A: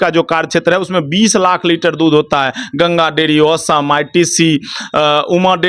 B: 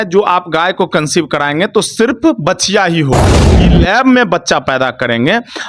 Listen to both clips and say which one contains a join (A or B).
B